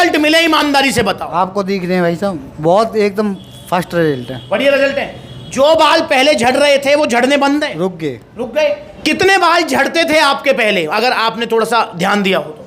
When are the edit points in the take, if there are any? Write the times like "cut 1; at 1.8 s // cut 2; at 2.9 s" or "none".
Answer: none